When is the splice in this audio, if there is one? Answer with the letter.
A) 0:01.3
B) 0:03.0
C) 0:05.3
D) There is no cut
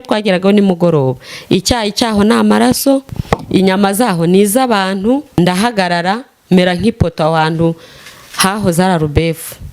C